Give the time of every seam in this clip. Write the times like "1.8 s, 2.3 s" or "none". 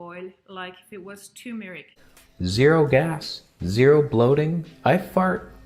1.9 s